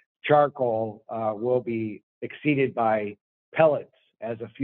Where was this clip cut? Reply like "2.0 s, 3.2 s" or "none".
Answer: 2.0 s